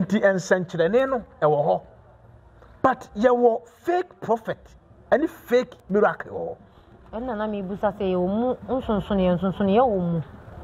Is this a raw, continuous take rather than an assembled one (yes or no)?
yes